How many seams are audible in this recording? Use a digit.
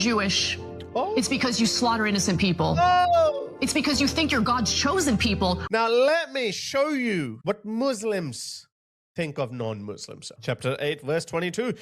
3